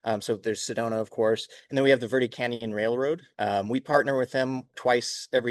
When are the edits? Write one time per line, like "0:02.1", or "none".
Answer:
0:03.3
0:04.7